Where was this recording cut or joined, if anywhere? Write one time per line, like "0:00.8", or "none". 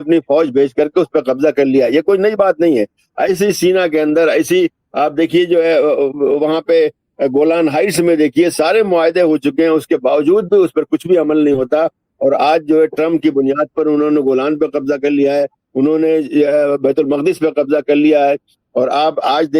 none